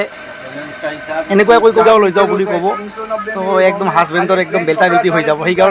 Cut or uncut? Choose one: cut